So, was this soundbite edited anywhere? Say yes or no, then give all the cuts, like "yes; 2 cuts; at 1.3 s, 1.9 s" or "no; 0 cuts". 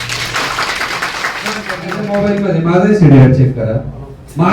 yes; 1 cut; at 2.0 s